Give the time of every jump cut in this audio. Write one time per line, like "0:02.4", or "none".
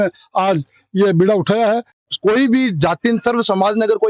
0:02.0